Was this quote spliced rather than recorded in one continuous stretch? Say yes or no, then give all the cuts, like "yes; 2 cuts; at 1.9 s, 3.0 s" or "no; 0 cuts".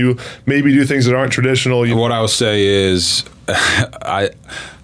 yes; 1 cut; at 1.9 s